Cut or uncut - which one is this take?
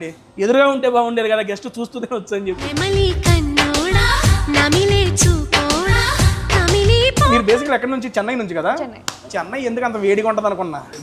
cut